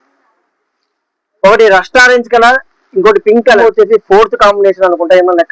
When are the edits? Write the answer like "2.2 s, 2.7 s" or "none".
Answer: 3.6 s